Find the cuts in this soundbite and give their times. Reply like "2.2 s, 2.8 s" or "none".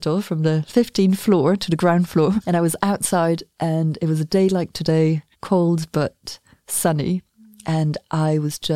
2.4 s, 5.3 s